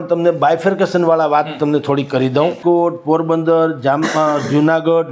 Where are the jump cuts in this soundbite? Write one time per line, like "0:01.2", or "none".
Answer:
0:02.6